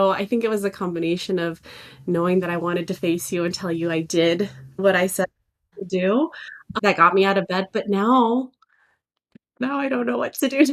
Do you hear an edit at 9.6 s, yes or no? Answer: no